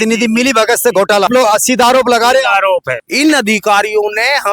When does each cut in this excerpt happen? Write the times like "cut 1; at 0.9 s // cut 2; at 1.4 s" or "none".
cut 1; at 1.3 s // cut 2; at 3.0 s